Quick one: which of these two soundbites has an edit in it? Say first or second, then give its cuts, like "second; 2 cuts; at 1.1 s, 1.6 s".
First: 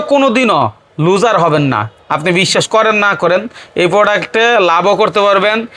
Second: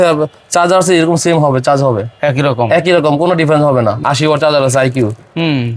second; 1 cut; at 4.0 s